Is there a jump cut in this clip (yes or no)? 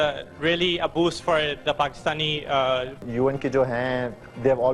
yes